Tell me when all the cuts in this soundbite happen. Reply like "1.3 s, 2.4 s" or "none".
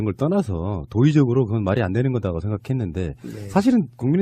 none